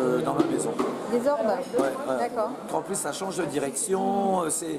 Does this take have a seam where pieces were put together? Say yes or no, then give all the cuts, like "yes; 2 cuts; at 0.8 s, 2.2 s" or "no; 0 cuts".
yes; 1 cut; at 2.7 s